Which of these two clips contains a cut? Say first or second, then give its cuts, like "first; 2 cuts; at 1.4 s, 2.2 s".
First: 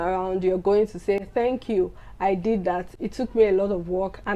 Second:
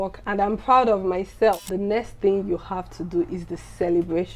second; 1 cut; at 1.6 s